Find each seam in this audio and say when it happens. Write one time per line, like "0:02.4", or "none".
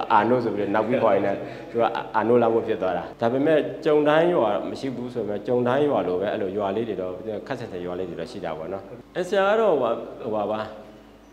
0:03.1
0:09.0